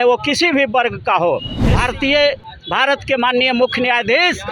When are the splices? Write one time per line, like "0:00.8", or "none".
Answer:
0:01.6